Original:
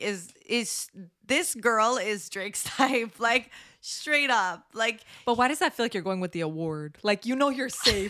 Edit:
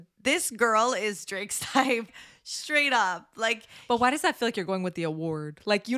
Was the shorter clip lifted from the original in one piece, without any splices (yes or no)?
no